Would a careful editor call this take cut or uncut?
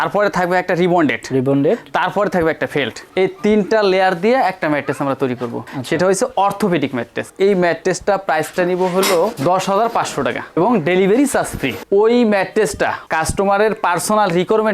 uncut